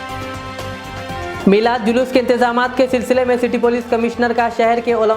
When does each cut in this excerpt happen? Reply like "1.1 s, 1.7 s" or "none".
1.4 s